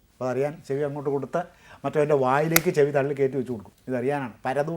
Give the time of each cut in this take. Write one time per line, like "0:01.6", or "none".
0:03.7